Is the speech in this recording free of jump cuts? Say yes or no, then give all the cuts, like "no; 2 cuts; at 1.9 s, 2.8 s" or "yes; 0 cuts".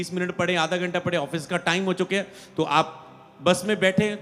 yes; 0 cuts